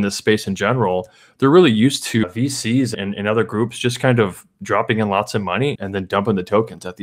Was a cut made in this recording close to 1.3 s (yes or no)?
no